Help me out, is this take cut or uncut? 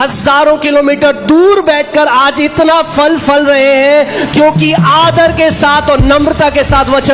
uncut